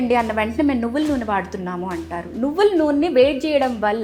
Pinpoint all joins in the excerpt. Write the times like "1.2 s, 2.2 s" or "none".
none